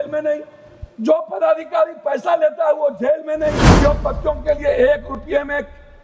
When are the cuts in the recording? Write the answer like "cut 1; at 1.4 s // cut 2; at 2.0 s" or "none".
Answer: cut 1; at 3.7 s